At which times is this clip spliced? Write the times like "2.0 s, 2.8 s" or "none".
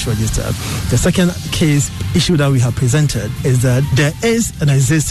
3.6 s